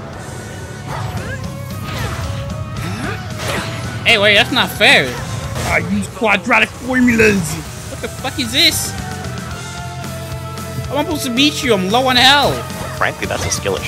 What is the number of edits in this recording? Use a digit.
1